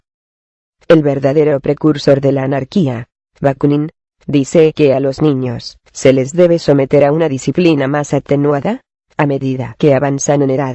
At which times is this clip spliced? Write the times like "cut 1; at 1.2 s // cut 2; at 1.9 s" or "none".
cut 1; at 2.2 s